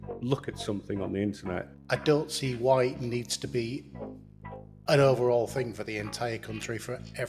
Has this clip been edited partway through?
yes; 1 cut; at 1.7 s

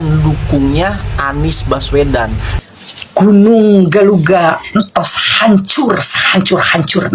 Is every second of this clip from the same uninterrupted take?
no; 1 cut; at 2.5 s

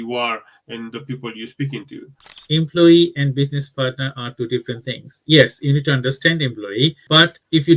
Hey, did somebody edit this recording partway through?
yes; 1 cut; at 2.4 s

